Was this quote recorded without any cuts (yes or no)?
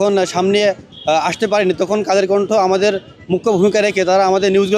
yes